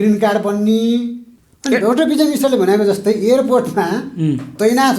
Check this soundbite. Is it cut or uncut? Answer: cut